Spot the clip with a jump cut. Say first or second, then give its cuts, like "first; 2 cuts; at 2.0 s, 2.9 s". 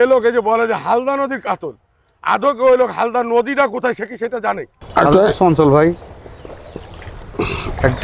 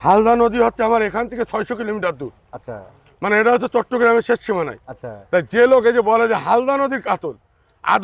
first; 1 cut; at 4.7 s